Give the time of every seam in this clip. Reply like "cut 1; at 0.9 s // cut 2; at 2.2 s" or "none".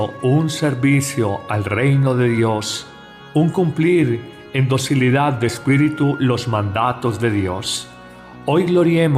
none